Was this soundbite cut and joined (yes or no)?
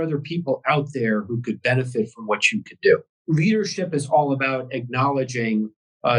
yes